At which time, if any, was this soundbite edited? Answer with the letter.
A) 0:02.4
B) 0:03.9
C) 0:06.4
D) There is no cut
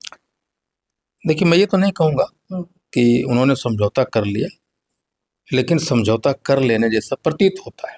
D